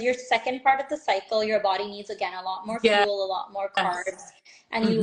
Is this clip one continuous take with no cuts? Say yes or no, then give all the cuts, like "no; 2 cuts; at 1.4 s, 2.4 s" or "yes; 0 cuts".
yes; 0 cuts